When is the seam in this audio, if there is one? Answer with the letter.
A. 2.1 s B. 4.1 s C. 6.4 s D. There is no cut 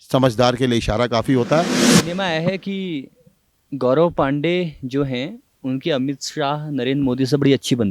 A